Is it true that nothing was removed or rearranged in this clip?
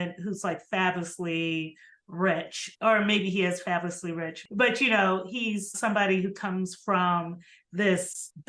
no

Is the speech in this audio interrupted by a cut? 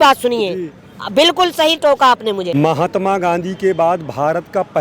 yes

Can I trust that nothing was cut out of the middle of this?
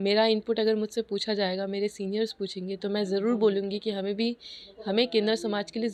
yes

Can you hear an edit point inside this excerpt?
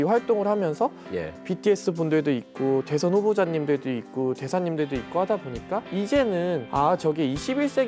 no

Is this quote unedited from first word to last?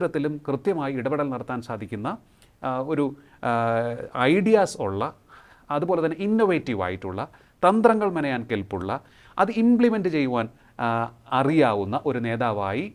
yes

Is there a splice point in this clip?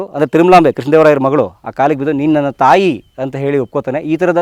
no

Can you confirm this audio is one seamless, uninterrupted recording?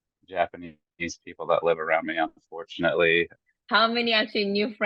no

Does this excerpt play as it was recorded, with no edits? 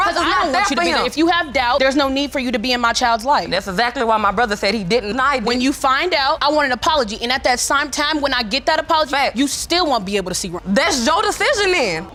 yes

